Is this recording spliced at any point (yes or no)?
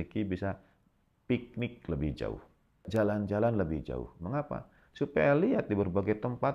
yes